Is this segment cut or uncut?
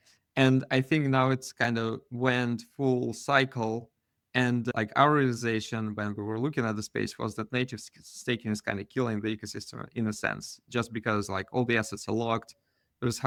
uncut